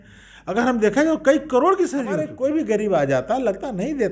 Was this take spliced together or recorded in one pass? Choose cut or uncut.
cut